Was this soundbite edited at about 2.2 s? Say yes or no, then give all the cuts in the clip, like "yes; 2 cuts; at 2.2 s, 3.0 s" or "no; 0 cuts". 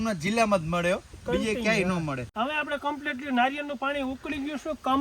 yes; 1 cut; at 2.2 s